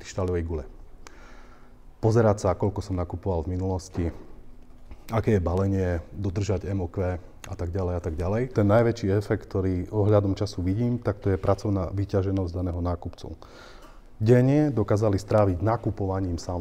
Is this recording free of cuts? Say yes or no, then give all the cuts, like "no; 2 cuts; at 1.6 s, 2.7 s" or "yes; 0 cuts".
no; 1 cut; at 8.5 s